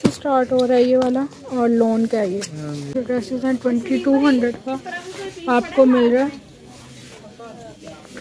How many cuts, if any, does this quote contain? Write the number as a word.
one